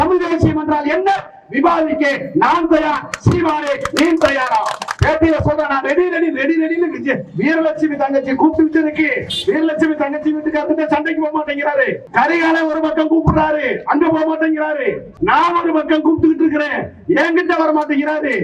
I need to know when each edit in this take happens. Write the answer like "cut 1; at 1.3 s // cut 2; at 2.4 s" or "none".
cut 1; at 4.9 s // cut 2; at 12.0 s // cut 3; at 15.1 s